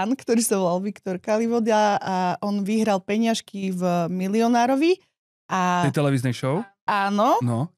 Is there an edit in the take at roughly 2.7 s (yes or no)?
no